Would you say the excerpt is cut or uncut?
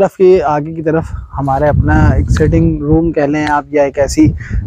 uncut